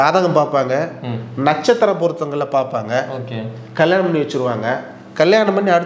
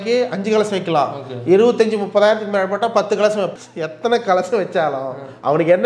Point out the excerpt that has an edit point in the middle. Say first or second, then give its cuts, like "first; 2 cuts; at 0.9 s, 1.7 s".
second; 1 cut; at 3.6 s